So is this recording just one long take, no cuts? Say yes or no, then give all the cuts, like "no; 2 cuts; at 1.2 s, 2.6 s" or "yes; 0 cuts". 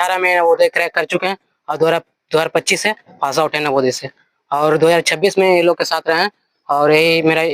yes; 0 cuts